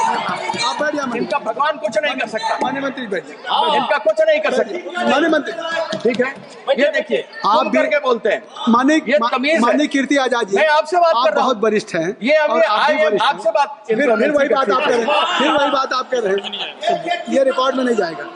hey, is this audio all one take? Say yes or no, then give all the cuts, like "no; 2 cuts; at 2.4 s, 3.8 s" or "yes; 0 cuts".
yes; 0 cuts